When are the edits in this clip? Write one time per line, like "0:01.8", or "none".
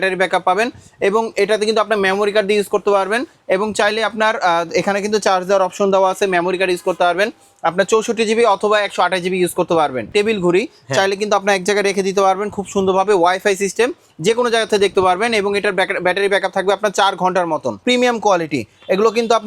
0:10.1
0:17.8